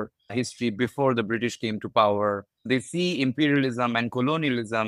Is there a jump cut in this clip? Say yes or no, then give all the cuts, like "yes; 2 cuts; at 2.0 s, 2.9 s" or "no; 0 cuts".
yes; 1 cut; at 2.5 s